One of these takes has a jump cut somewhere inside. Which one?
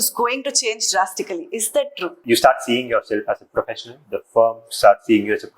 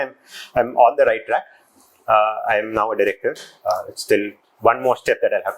first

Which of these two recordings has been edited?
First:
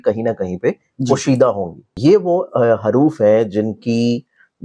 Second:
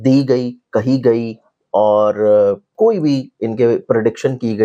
first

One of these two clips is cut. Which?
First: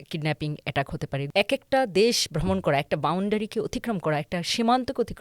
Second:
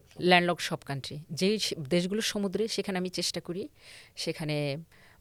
first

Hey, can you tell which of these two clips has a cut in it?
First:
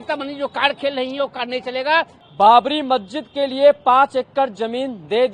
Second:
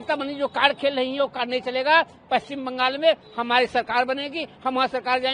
first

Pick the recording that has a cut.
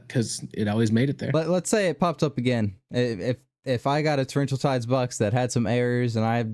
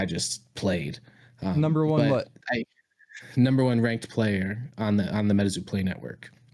first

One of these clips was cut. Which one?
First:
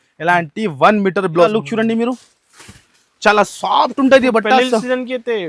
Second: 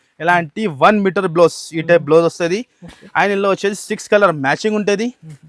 first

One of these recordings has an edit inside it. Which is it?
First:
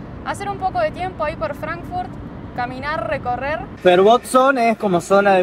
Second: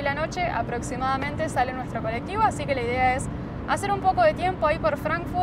first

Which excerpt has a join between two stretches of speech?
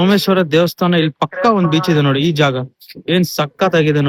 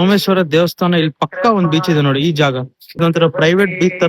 second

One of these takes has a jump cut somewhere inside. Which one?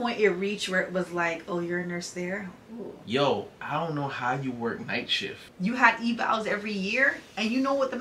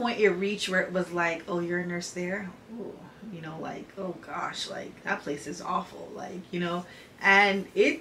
first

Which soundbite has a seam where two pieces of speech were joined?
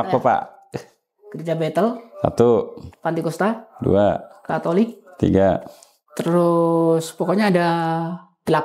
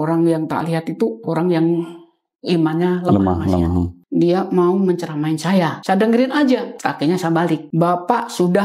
second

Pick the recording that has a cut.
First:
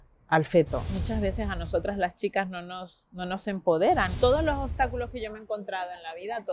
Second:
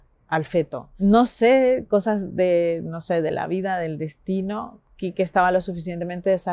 first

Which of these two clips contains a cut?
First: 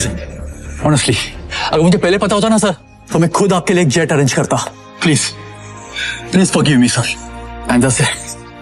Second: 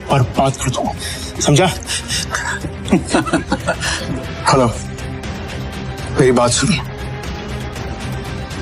second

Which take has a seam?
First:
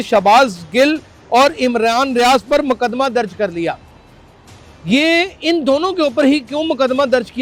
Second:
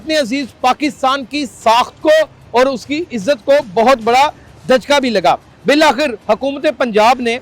second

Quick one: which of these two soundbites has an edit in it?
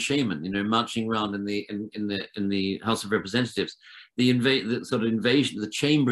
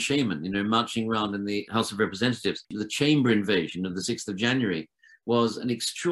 second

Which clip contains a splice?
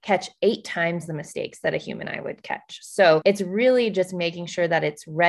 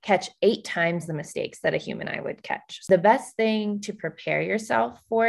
second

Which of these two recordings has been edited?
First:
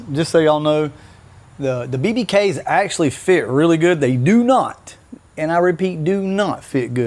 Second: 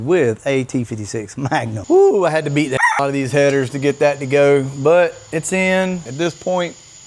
second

